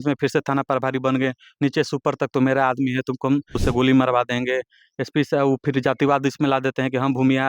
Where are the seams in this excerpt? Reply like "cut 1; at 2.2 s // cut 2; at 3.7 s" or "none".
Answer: cut 1; at 3.6 s

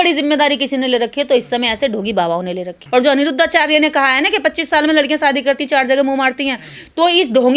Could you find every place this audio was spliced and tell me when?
cut 1; at 2.8 s

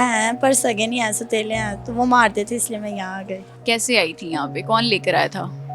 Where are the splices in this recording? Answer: cut 1; at 3.5 s

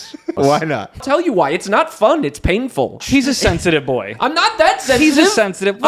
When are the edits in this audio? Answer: cut 1; at 1.0 s // cut 2; at 3.0 s

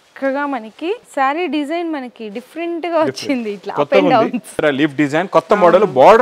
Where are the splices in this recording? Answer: cut 1; at 1.1 s // cut 2; at 4.6 s

